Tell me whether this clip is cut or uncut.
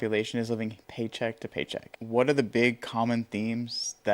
cut